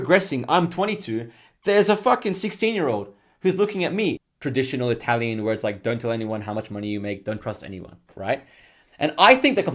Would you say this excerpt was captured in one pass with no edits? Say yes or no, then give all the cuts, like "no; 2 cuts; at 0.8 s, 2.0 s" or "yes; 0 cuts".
no; 1 cut; at 4.3 s